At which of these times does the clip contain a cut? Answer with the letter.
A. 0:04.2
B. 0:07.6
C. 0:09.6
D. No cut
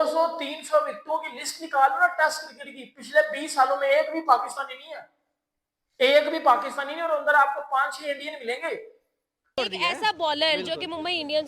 C